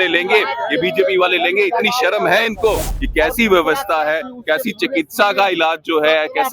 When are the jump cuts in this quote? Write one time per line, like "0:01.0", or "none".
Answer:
0:02.9